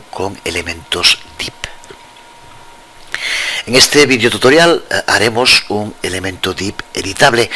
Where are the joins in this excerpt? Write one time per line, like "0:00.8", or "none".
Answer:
0:01.0

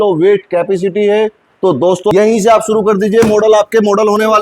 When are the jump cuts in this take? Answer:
0:02.1

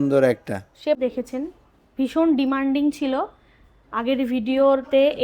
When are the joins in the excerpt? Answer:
0:01.0

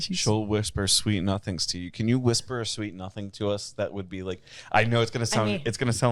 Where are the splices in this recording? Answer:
none

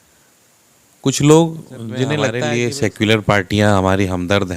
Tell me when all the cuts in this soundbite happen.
0:02.3

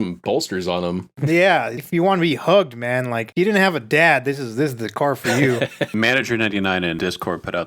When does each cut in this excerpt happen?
0:01.1
0:01.8
0:05.9
0:07.0

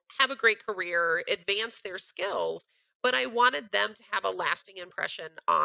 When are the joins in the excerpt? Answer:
none

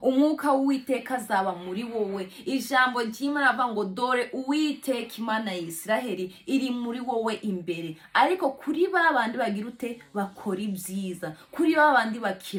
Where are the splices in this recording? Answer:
none

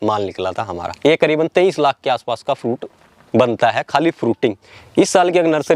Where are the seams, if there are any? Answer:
0:00.9
0:04.7

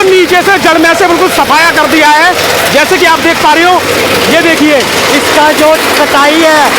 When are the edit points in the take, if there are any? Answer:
none

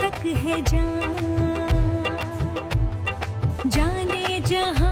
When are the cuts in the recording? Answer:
none

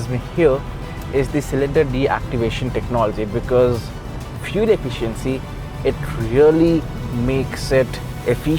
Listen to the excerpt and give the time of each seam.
none

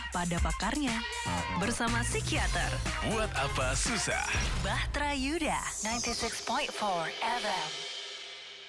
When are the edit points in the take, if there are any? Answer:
none

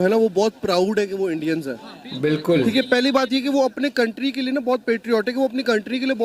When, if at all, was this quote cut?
none

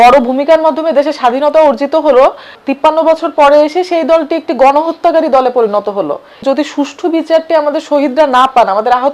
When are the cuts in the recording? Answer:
0:02.6
0:06.4

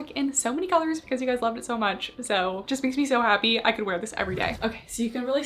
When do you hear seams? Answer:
none

